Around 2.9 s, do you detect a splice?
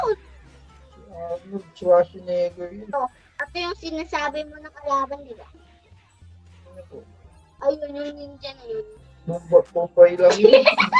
yes; 1 cut; at 2.9 s

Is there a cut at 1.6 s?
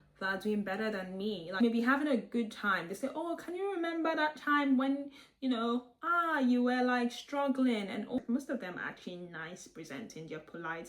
yes; 2 cuts; at 1.6 s, 8.2 s

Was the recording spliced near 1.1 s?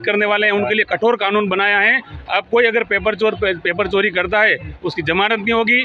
no; 0 cuts

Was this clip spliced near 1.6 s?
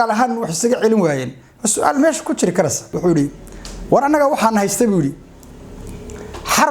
no; 1 cut; at 2.9 s

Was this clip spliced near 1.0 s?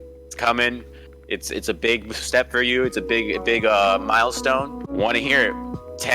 no; 1 cut; at 4.9 s

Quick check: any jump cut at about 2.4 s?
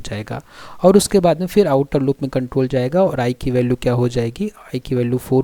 no; 0 cuts

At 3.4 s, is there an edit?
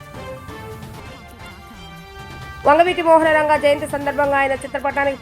no; 1 cut; at 0.9 s

